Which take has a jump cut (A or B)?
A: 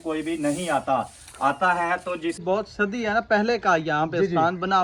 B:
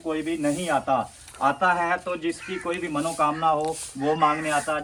A